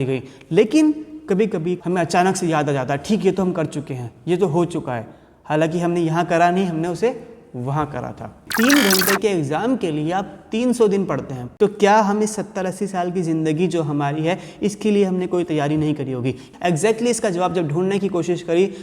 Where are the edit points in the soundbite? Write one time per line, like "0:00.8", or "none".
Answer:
0:01.8
0:08.4
0:11.4
0:16.4